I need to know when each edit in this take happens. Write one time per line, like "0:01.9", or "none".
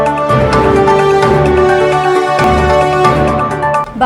0:01.1